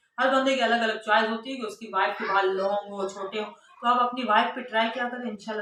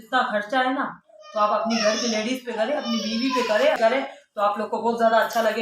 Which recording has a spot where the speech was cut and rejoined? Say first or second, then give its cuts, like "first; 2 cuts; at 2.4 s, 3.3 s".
second; 1 cut; at 3.8 s